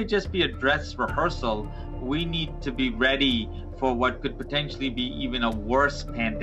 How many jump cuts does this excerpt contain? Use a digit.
0